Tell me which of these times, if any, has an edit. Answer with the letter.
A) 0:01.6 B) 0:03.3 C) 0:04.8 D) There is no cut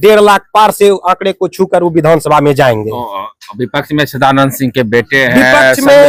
D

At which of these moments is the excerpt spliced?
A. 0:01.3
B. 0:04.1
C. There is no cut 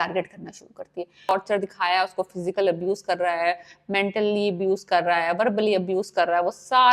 A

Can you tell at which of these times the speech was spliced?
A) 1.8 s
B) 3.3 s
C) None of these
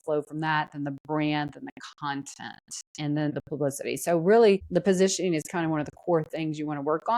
B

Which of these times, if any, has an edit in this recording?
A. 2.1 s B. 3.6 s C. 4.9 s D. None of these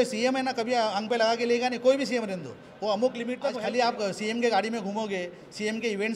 B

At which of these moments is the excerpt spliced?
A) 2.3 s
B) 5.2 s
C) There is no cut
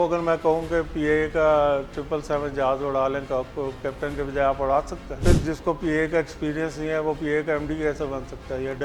B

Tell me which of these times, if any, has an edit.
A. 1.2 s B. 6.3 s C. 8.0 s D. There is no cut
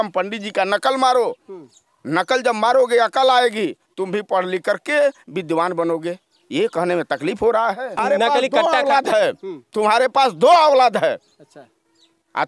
C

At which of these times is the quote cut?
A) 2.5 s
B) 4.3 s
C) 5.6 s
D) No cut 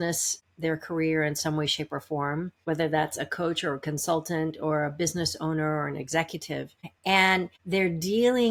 D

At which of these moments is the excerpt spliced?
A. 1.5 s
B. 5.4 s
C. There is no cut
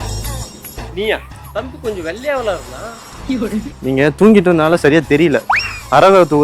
A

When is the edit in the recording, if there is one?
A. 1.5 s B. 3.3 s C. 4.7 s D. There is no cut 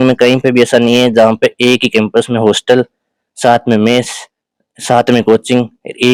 D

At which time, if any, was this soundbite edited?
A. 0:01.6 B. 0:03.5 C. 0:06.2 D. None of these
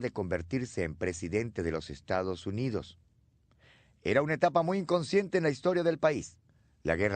B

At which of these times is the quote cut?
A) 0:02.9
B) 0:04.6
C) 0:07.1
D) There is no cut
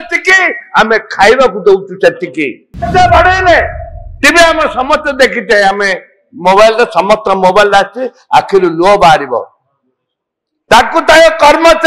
A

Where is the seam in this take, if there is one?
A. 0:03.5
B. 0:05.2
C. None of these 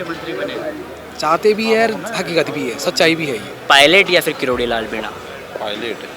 A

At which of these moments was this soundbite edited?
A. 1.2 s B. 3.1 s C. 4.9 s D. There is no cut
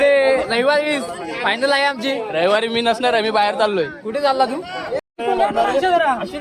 D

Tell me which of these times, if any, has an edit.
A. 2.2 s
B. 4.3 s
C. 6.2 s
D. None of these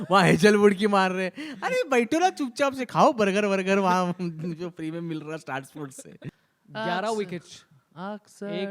C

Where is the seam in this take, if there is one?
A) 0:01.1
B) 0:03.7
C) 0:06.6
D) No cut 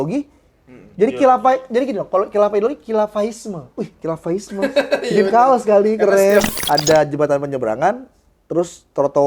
C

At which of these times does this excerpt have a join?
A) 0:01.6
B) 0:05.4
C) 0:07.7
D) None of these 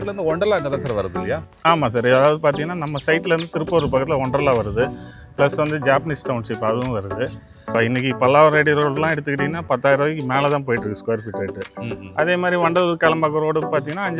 C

